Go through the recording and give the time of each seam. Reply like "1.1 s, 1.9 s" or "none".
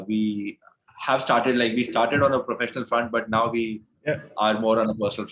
none